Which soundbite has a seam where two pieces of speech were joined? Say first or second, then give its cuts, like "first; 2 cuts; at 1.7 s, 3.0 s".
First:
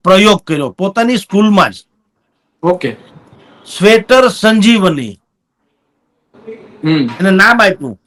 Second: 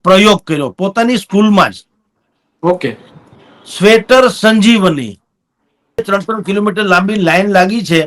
second; 1 cut; at 6.0 s